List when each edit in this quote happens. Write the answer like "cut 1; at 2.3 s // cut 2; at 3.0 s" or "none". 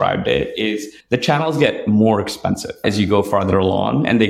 cut 1; at 0.9 s // cut 2; at 2.8 s